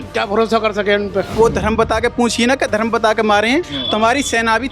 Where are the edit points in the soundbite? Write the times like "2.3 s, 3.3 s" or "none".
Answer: 1.3 s